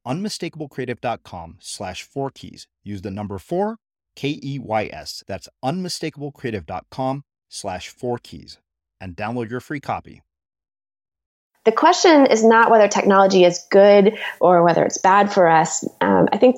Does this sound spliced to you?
yes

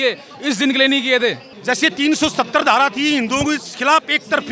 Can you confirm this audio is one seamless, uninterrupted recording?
no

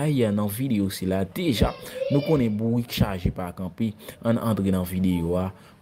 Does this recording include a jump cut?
no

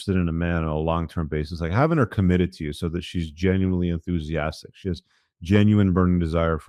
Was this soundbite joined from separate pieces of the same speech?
no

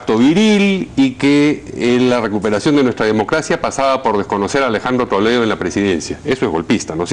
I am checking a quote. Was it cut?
yes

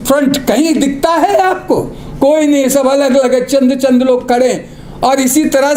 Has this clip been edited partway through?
no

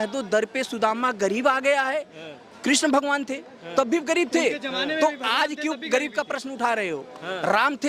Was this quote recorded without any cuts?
yes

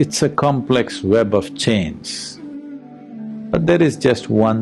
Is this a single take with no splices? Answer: no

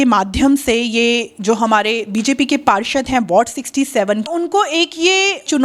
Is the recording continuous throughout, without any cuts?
no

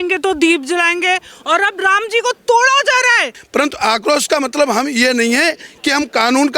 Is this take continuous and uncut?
no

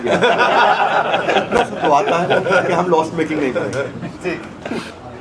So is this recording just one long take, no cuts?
yes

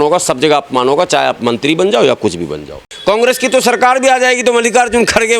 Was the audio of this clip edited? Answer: yes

